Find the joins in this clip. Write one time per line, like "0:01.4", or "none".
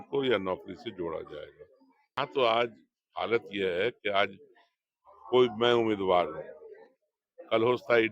0:02.2